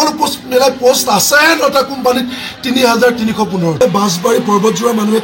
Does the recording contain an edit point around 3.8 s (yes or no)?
yes